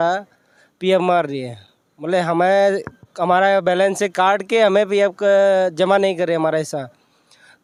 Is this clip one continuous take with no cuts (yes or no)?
yes